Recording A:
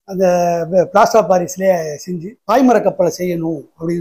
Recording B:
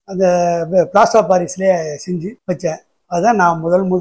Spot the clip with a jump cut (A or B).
A